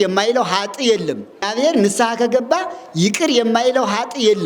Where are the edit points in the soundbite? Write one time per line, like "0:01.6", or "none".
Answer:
0:01.5